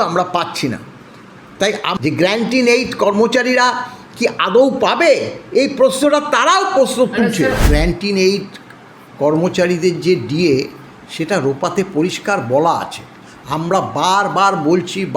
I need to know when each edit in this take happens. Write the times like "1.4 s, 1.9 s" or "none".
1.9 s, 7.6 s